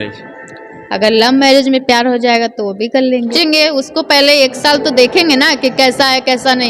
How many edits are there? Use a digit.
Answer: 1